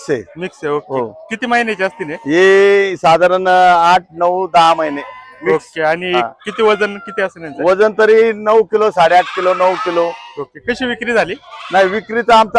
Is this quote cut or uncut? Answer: uncut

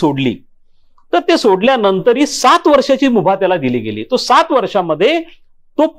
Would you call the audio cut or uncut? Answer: uncut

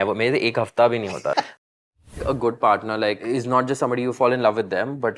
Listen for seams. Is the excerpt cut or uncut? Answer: cut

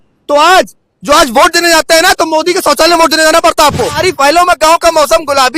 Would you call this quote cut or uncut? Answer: cut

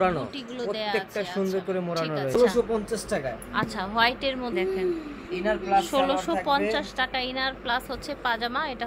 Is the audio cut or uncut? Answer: cut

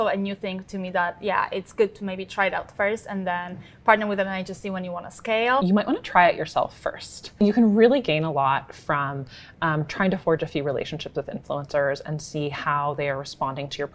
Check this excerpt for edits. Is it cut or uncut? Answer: cut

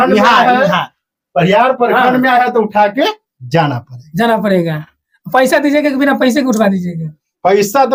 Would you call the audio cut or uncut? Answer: uncut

